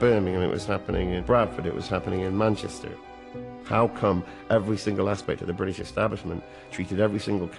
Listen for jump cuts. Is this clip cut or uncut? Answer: cut